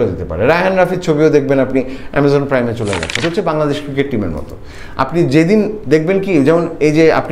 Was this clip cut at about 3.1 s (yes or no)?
yes